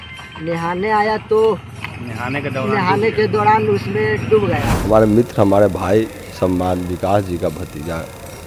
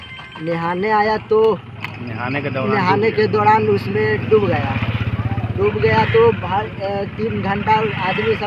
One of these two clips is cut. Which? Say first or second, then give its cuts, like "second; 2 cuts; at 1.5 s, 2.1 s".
first; 1 cut; at 4.7 s